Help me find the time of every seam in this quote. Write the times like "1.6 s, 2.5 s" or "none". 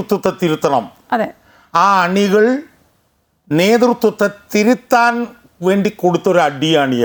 none

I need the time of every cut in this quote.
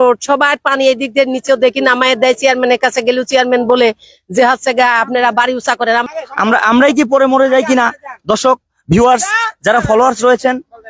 6.1 s

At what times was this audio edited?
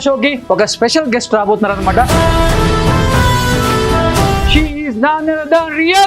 2.1 s, 4.4 s

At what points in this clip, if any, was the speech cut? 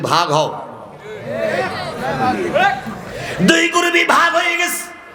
none

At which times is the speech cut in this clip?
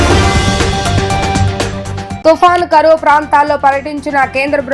1.6 s

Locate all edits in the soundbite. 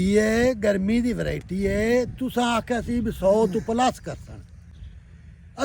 none

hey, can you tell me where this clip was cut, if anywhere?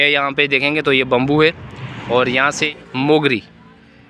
2.6 s

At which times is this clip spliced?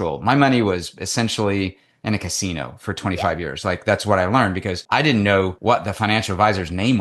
4.7 s, 5.6 s

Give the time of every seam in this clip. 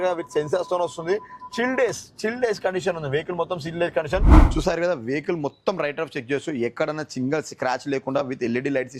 4.4 s

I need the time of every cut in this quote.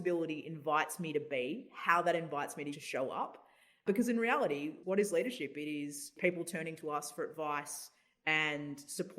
2.7 s, 3.8 s, 4.7 s, 6.1 s

